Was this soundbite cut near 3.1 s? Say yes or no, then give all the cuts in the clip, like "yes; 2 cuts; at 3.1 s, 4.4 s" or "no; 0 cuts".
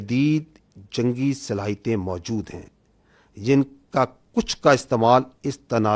no; 0 cuts